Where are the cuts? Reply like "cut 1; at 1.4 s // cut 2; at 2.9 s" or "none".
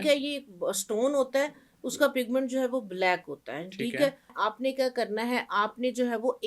cut 1; at 4.3 s